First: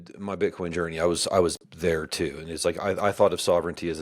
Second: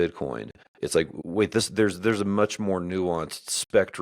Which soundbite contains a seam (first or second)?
second